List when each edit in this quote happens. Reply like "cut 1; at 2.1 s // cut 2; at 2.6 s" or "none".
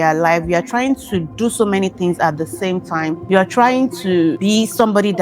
cut 1; at 3.2 s // cut 2; at 4.4 s